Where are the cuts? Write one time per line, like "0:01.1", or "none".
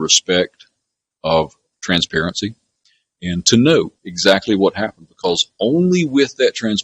none

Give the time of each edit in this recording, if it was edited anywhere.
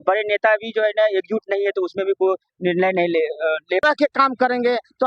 0:03.8

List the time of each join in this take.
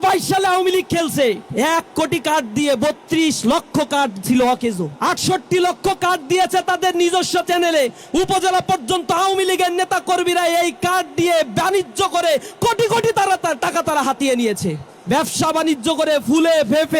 0:01.4
0:04.9
0:14.9

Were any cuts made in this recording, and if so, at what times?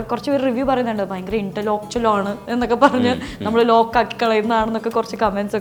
none

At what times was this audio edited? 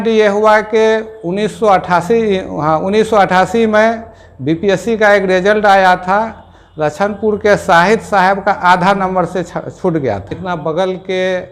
0:10.3

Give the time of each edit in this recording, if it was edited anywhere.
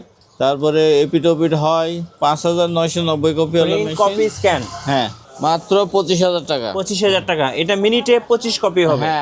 0:05.2

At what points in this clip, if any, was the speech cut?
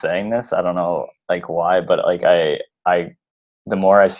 none

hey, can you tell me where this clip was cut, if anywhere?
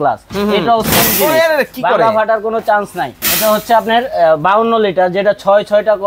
0:03.2

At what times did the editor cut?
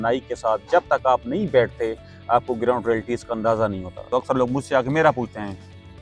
0:04.0

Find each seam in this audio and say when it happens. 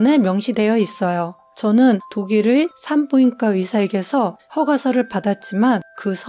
0:02.1
0:04.4

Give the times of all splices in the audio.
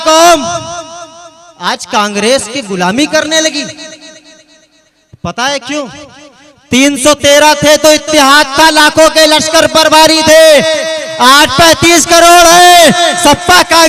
none

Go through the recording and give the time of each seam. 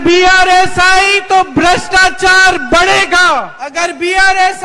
0:03.6

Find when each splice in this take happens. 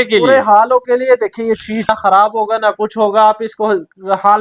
0:01.9

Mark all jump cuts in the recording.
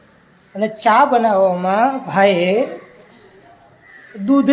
none

